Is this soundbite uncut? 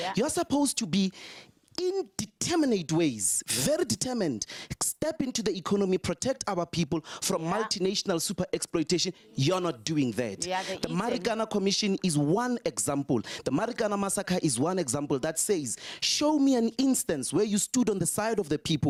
yes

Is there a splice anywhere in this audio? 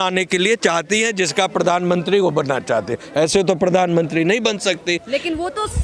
no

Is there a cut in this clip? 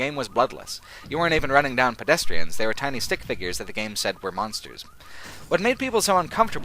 yes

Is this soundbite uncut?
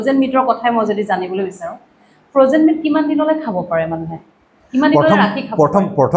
yes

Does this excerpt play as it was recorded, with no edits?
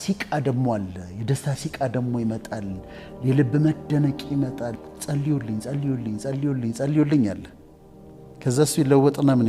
no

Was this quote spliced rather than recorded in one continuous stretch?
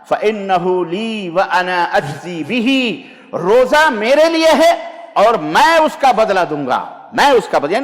no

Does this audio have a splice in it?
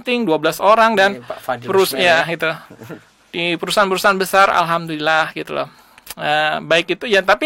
no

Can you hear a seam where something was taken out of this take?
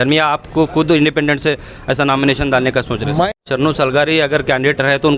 yes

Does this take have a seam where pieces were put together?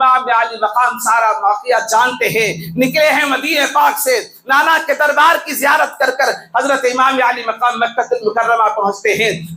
no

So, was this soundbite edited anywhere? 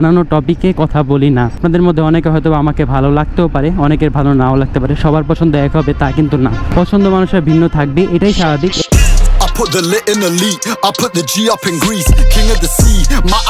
yes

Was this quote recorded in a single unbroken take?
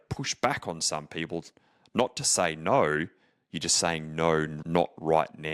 no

